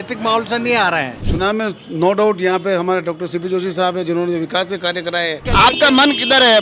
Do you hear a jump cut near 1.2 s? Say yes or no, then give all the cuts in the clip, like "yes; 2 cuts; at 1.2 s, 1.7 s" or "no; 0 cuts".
yes; 2 cuts; at 1.2 s, 5.5 s